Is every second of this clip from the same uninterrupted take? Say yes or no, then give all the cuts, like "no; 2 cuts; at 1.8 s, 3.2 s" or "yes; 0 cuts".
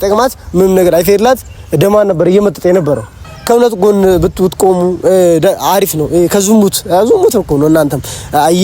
no; 1 cut; at 3.3 s